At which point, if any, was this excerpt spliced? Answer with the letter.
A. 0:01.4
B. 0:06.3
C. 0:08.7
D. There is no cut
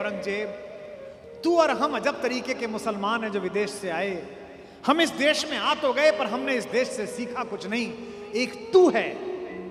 D